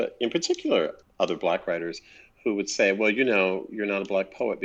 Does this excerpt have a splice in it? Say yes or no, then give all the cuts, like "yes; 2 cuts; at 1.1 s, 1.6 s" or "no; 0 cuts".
yes; 1 cut; at 1.0 s